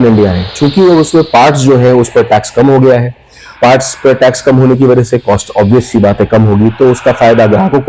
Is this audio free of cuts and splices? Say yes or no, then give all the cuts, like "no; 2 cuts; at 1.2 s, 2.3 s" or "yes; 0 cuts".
yes; 0 cuts